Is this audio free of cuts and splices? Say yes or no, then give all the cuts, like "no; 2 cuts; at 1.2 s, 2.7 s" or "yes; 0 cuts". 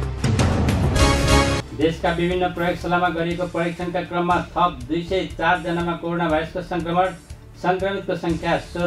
no; 1 cut; at 1.4 s